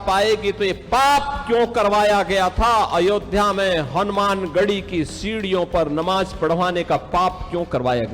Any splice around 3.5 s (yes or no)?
no